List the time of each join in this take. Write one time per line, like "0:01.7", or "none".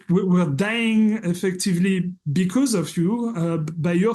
none

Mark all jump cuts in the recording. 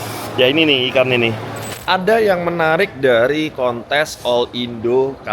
0:01.7

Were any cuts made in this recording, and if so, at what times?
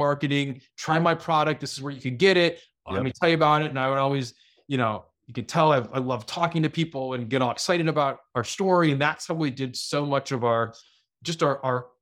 none

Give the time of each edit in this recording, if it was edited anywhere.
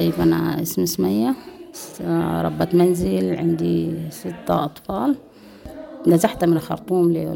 none

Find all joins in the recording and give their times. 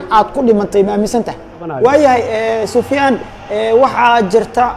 0:01.7

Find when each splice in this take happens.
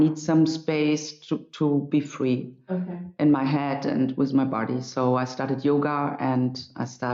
none

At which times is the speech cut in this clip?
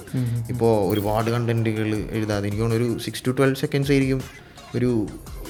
none

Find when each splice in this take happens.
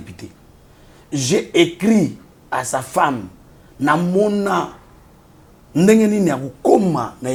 none

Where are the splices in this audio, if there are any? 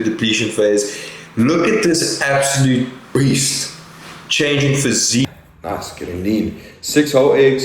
0:05.3

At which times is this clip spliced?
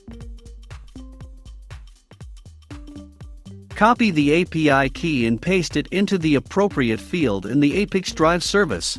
0:03.7

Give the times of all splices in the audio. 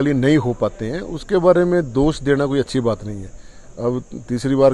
none

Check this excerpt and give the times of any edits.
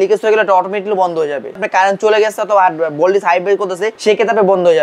0:01.6
0:03.9

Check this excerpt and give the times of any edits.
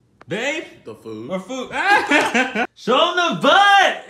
0:02.8

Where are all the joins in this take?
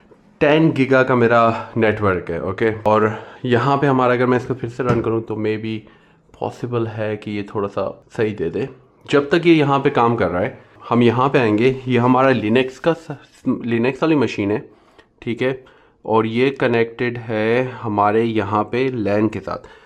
0:02.9
0:08.0
0:10.7

